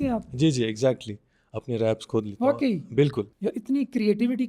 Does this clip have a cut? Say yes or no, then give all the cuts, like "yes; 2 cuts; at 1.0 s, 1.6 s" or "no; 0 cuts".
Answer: yes; 1 cut; at 3.3 s